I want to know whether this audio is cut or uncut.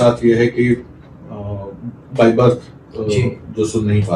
uncut